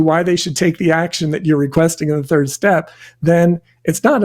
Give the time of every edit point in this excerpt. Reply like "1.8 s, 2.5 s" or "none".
1.7 s